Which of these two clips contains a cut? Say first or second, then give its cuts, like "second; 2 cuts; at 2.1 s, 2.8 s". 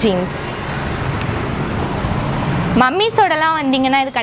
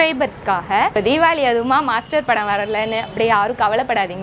second; 1 cut; at 1.0 s